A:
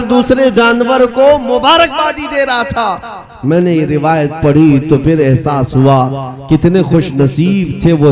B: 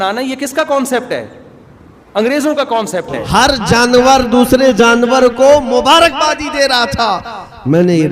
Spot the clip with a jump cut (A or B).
B